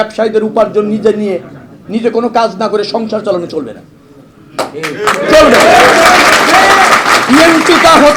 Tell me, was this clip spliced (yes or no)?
no